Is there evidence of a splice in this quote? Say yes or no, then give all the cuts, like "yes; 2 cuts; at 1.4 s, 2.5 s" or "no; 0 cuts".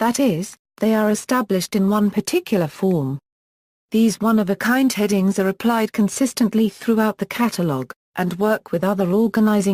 yes; 1 cut; at 1.8 s